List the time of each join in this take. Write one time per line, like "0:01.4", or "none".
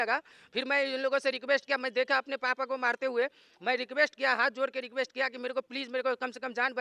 none